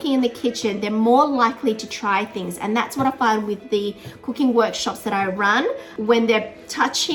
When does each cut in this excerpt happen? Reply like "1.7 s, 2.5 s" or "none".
none